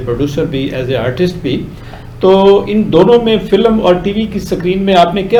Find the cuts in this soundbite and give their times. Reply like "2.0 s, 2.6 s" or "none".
none